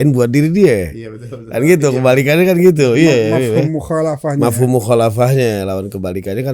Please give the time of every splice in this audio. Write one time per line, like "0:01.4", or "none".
none